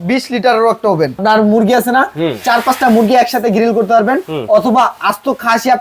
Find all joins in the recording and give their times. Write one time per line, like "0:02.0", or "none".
0:01.2